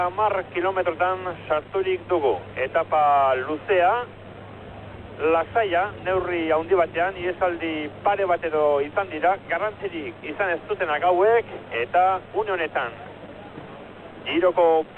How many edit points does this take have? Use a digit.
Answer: 1